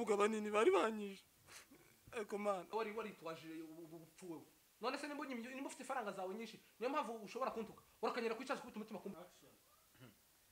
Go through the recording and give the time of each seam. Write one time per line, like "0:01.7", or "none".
0:02.7
0:09.1